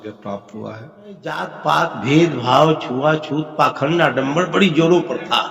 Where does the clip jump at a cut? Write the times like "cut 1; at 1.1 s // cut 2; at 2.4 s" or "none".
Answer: cut 1; at 1.4 s

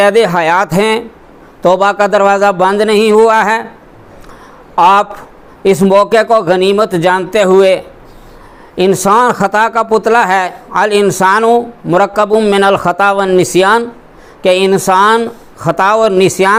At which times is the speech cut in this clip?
none

